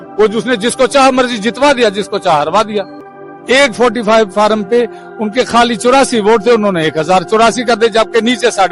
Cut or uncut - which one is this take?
cut